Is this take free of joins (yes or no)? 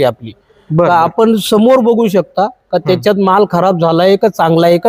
yes